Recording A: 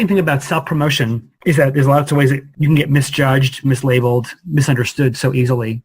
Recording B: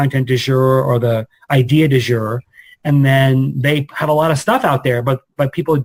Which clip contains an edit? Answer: A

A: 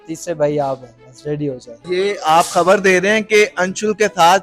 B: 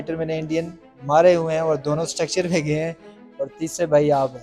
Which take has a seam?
A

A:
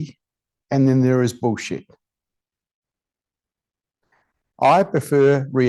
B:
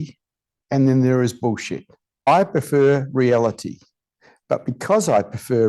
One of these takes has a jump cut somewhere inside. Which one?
B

